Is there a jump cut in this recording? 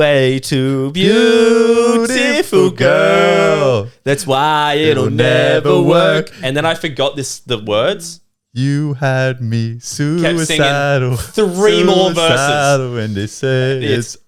no; 0 cuts

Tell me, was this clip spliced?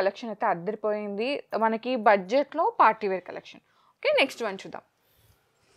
no; 0 cuts

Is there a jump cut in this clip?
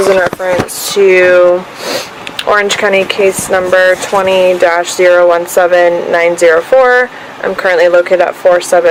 no; 0 cuts

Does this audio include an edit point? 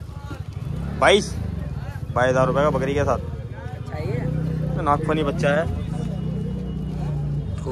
no; 0 cuts

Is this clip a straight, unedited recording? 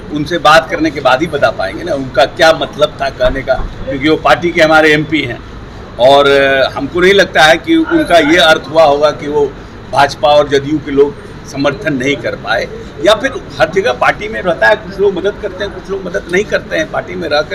yes; 0 cuts

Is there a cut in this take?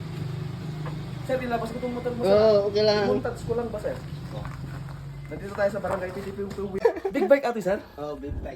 yes; 1 cut; at 6.8 s

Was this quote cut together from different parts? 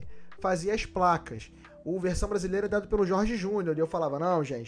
yes; 1 cut; at 1.7 s

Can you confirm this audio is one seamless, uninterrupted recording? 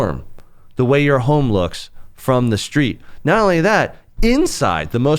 yes; 0 cuts

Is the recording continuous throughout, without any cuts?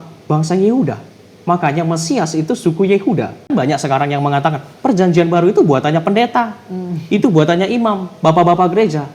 no; 1 cut; at 3.5 s

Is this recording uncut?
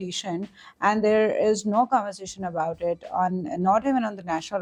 yes; 0 cuts

